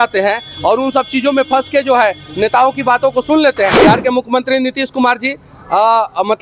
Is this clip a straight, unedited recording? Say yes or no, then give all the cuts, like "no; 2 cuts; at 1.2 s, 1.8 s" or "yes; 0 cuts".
no; 1 cut; at 3.8 s